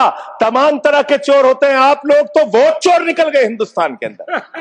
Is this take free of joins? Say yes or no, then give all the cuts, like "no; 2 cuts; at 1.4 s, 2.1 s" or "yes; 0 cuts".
yes; 0 cuts